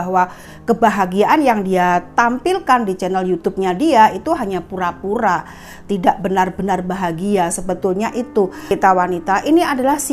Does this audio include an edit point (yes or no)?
yes